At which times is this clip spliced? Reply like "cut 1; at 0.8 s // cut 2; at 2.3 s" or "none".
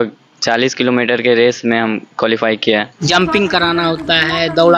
cut 1; at 3.1 s